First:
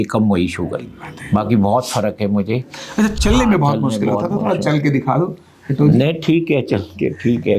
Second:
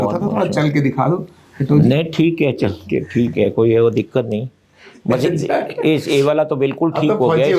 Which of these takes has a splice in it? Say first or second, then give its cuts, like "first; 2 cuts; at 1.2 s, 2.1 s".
first; 2 cuts; at 1.1 s, 3.1 s